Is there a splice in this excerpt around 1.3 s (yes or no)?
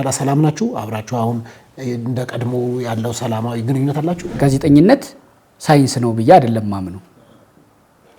no